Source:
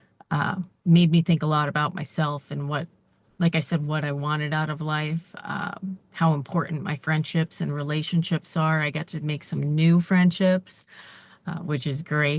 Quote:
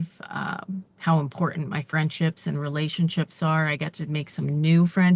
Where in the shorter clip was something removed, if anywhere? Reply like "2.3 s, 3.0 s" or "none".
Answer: none